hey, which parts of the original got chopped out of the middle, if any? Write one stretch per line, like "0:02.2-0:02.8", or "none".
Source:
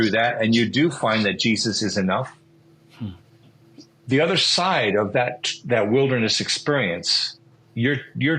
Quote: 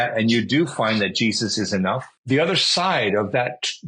0:02.4-0:03.9